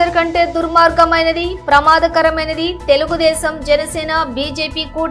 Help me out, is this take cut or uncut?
uncut